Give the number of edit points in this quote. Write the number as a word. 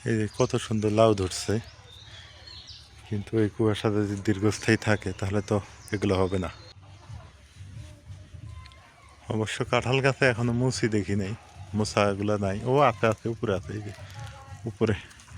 one